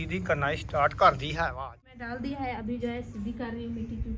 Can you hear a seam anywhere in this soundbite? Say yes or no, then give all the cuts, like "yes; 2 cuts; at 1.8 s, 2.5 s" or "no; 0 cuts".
yes; 1 cut; at 1.8 s